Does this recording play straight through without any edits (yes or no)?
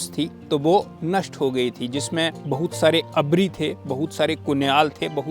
no